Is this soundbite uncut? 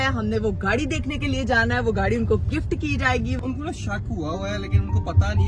no; 1 cut; at 3.4 s

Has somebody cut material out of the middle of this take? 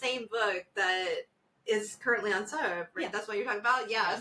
no; 0 cuts

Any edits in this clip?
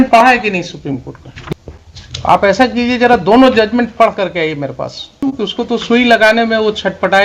yes; 2 cuts; at 1.5 s, 5.2 s

